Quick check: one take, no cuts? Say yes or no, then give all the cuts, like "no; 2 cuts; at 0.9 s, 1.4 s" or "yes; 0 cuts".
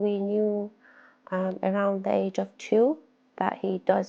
yes; 0 cuts